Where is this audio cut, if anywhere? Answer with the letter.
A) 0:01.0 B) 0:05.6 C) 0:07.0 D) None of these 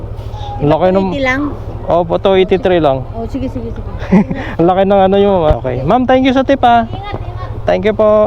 B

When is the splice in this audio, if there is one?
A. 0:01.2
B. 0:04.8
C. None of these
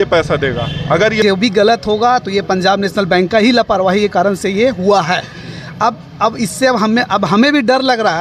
A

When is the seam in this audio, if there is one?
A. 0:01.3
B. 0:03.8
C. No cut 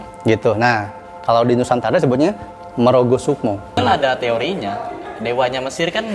B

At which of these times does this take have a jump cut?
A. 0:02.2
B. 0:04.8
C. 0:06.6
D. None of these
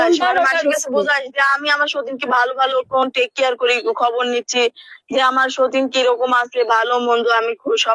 D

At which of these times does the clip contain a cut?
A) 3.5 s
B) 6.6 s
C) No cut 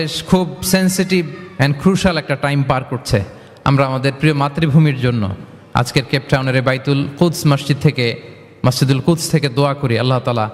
C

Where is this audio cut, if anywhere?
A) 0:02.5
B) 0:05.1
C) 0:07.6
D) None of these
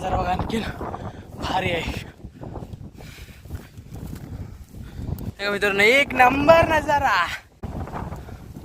C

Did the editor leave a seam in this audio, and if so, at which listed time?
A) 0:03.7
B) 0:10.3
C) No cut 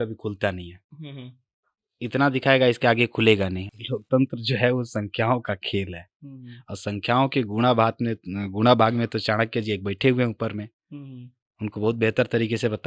A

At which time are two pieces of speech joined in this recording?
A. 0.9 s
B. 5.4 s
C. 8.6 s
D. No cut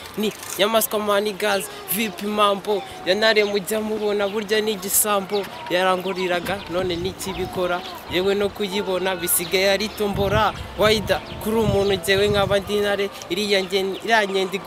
D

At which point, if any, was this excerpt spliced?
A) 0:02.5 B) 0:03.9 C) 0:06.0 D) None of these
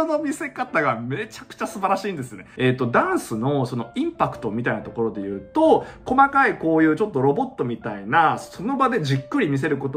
A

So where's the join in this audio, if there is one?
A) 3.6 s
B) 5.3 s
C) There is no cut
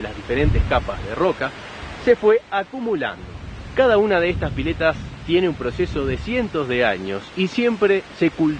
A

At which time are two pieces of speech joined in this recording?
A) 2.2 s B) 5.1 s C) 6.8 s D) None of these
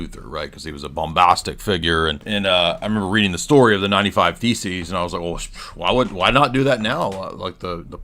A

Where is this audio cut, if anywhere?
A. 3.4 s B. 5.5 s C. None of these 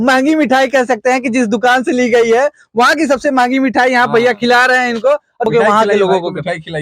B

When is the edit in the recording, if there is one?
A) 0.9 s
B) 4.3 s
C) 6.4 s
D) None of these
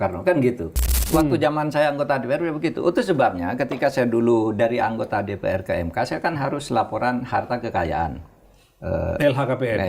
A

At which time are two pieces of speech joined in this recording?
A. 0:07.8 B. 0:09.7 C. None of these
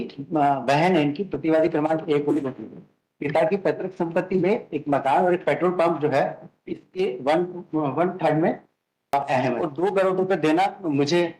B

